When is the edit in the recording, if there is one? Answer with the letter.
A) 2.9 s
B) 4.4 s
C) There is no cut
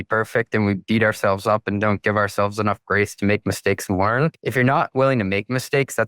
B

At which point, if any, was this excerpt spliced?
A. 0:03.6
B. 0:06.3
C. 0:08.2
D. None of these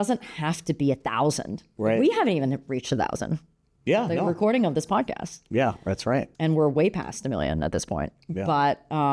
B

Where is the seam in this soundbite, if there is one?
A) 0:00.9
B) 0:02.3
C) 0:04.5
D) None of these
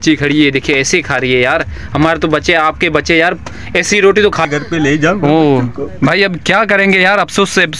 C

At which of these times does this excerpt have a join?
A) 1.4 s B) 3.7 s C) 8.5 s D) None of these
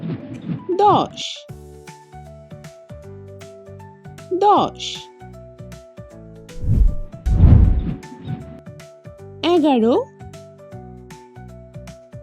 D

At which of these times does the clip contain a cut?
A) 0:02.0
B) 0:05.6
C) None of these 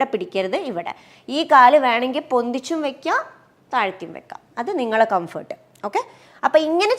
C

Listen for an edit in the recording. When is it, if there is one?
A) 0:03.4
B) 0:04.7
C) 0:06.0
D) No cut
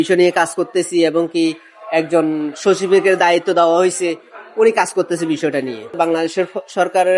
C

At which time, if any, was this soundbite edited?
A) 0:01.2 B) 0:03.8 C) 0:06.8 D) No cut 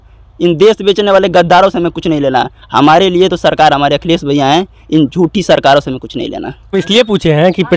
C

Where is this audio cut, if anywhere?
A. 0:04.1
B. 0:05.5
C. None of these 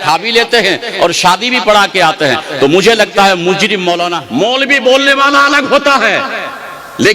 A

